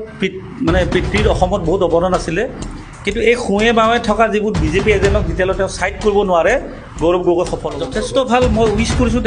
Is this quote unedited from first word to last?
no; 1 cut; at 7.7 s

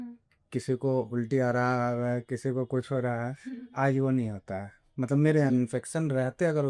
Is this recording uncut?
no; 1 cut; at 5.5 s

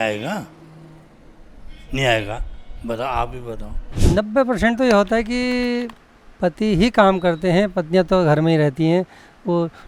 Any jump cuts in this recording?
no; 0 cuts

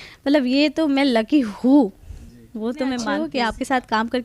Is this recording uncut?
no; 1 cut; at 3.1 s

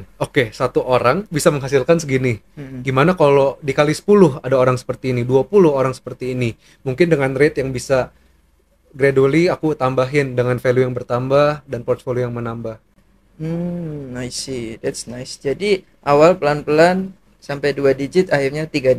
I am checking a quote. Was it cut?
no; 0 cuts

